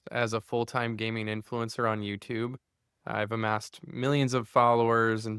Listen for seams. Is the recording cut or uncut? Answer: uncut